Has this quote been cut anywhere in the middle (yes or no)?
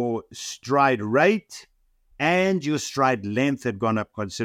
yes